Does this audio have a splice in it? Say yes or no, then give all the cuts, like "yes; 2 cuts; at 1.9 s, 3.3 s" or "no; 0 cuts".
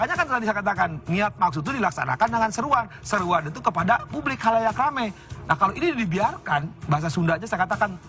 yes; 1 cut; at 5.3 s